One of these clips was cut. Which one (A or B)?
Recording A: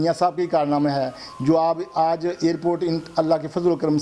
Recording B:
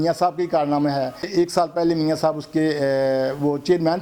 B